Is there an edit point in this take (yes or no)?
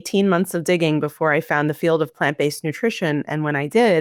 no